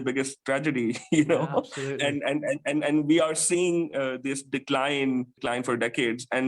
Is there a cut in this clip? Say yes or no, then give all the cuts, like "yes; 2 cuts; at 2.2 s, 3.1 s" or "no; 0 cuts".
yes; 1 cut; at 5.4 s